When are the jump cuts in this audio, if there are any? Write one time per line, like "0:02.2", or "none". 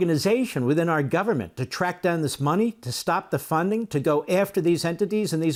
none